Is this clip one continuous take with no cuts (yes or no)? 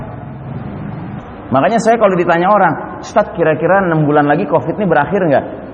no